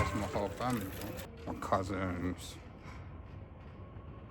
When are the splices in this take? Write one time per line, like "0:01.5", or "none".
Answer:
0:01.3